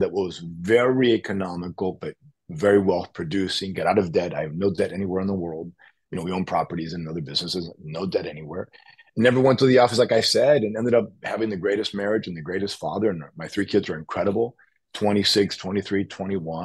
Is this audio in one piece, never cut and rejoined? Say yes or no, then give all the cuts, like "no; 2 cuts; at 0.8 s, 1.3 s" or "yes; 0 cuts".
yes; 0 cuts